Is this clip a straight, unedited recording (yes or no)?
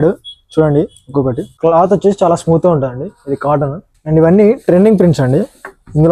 no